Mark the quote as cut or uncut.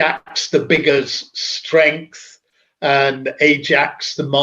uncut